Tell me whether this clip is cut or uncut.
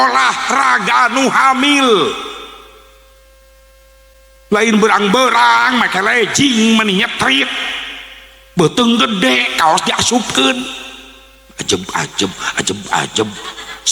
cut